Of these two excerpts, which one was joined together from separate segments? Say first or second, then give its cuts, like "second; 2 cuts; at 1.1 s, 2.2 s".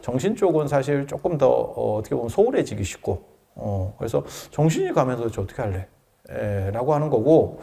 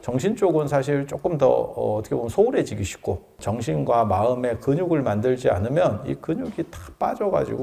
second; 1 cut; at 3.3 s